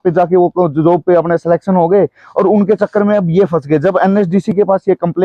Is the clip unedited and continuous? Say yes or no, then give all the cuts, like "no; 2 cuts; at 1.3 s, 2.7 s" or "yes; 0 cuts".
yes; 0 cuts